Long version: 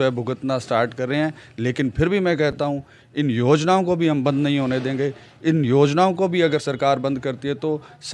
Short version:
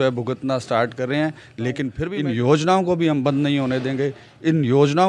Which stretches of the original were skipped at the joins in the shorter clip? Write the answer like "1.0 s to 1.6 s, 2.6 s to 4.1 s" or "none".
1.8 s to 2.8 s